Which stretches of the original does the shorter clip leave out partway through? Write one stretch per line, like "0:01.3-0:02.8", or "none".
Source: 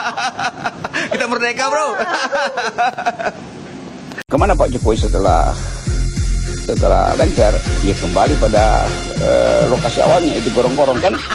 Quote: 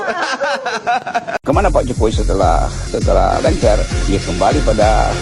0:03.3-0:04.2
0:05.6-0:06.5